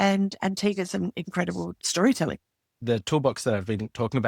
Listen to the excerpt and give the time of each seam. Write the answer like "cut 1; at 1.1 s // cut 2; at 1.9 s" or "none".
cut 1; at 2.7 s